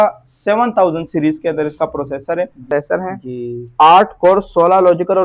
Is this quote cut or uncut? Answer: cut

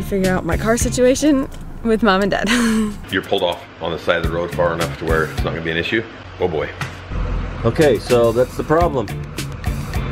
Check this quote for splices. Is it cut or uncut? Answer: cut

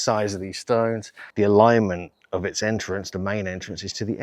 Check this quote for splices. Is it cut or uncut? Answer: cut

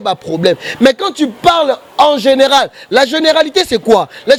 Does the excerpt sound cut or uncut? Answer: uncut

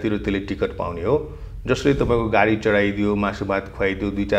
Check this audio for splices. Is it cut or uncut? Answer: uncut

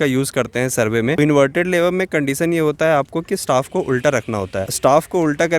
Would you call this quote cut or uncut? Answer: cut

